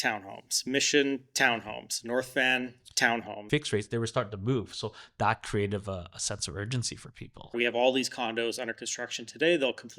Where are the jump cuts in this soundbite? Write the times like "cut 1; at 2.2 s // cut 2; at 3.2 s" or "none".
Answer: cut 1; at 3.4 s // cut 2; at 7.5 s